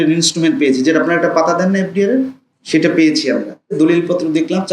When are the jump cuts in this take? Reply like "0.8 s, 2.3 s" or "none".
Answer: 3.7 s